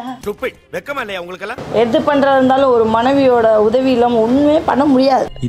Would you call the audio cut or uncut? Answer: cut